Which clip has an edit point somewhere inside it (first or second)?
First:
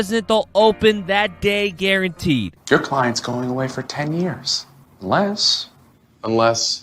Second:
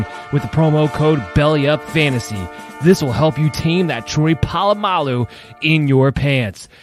first